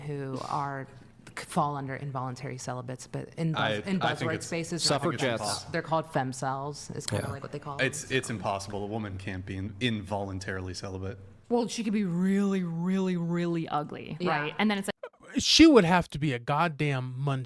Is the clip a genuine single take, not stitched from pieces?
yes; 0 cuts

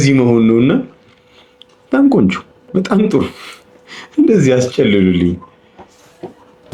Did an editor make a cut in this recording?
no; 0 cuts

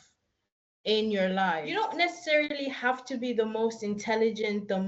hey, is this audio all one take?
no; 1 cut; at 1.7 s

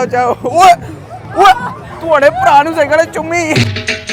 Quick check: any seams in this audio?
no; 0 cuts

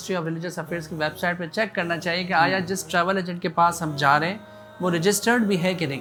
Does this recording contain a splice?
no; 0 cuts

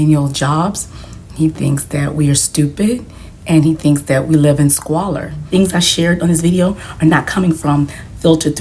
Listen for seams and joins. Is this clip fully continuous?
no; 1 cut; at 5.5 s

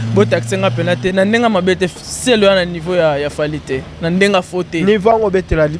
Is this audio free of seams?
yes; 0 cuts

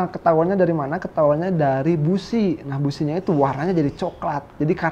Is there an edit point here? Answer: no; 0 cuts

